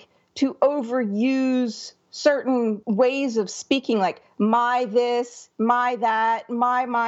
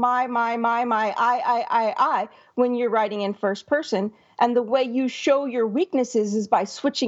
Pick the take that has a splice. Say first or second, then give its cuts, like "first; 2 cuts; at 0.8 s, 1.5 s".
first; 1 cut; at 2.8 s